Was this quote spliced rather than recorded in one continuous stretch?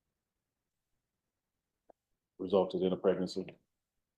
no; 0 cuts

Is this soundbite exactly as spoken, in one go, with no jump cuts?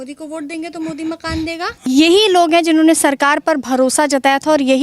no; 1 cut; at 1.7 s

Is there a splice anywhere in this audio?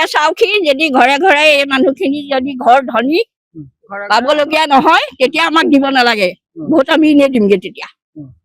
no; 0 cuts

